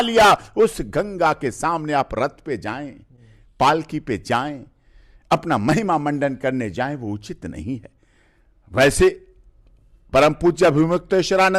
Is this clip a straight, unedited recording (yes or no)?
yes